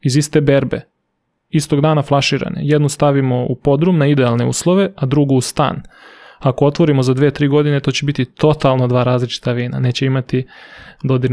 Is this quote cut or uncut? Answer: uncut